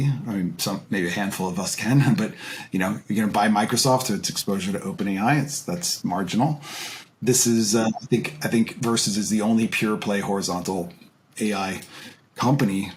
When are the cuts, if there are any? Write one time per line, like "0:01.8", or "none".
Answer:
none